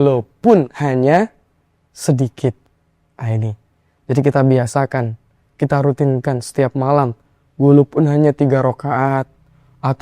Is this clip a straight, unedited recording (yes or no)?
yes